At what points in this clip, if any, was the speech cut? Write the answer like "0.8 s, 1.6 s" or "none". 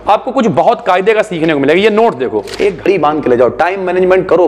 2.8 s